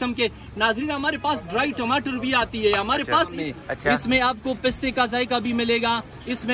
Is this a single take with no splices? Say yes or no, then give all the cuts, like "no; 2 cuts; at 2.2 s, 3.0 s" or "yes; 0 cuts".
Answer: no; 1 cut; at 3.4 s